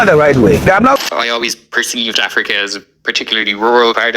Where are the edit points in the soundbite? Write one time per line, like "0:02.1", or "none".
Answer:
0:01.0